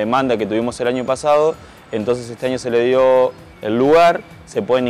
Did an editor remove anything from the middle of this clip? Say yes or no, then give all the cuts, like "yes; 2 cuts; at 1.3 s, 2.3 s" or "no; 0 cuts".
no; 0 cuts